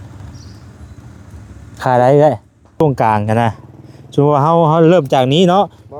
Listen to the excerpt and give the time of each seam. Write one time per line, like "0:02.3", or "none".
0:02.8